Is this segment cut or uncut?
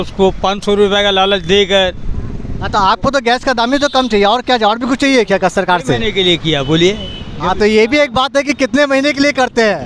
uncut